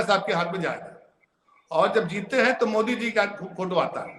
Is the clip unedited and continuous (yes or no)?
yes